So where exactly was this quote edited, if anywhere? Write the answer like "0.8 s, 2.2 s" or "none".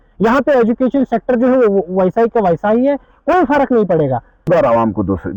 4.5 s